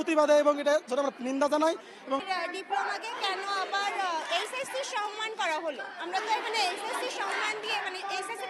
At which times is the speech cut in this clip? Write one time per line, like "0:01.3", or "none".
0:02.2